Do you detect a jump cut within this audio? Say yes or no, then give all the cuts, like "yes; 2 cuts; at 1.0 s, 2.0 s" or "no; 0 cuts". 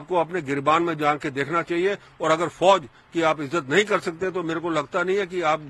no; 0 cuts